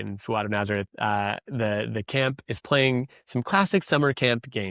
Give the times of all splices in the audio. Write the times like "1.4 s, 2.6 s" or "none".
none